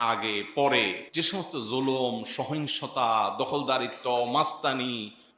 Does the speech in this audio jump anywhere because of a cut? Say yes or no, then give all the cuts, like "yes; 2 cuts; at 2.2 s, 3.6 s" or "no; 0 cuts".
yes; 1 cut; at 1.0 s